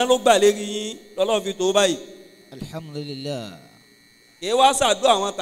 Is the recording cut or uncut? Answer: uncut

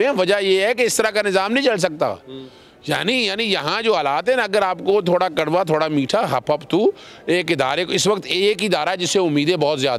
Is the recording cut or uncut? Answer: uncut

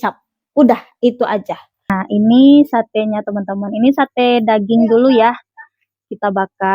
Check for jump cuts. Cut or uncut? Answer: cut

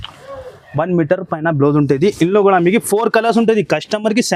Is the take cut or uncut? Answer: uncut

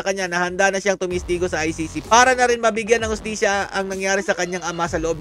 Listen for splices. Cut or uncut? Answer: uncut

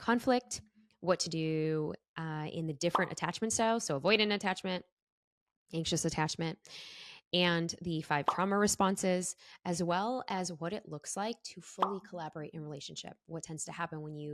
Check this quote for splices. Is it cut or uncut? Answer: uncut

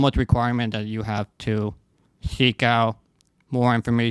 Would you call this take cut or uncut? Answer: uncut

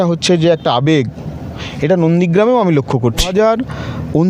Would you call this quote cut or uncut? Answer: cut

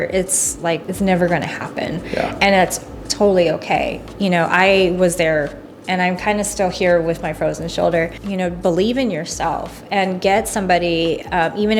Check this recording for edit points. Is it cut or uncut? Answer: cut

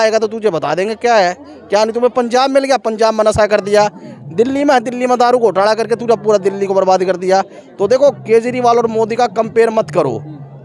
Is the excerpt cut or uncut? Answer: uncut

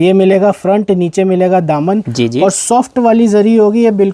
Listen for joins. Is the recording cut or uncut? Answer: uncut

